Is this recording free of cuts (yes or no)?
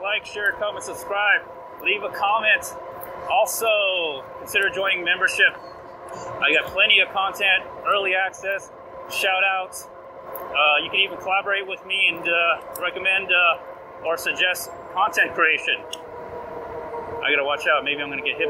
yes